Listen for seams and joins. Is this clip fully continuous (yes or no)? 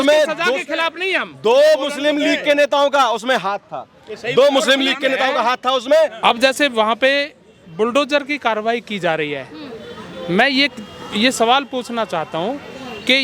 no